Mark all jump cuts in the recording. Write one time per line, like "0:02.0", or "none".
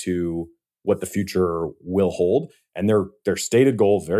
0:02.6